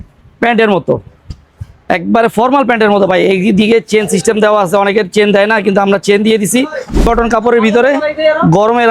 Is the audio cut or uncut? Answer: cut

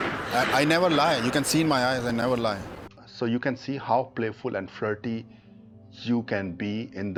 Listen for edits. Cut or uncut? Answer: uncut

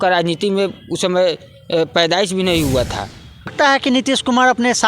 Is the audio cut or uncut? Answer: cut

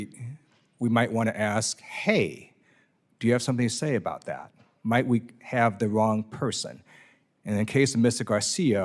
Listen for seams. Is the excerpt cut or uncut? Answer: uncut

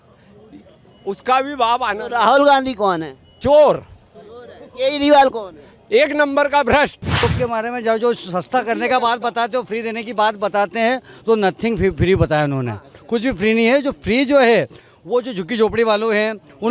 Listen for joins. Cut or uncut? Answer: cut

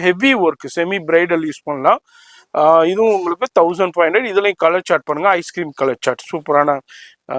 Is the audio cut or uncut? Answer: uncut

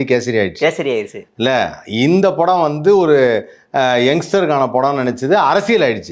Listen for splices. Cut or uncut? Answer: uncut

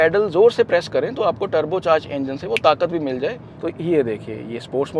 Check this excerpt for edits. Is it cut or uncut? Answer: cut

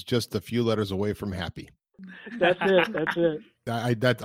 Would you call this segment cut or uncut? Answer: uncut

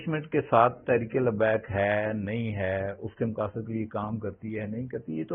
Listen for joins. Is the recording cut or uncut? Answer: uncut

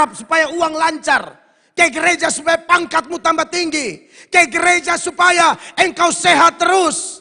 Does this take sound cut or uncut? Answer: uncut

